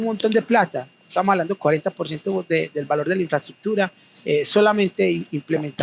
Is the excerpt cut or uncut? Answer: uncut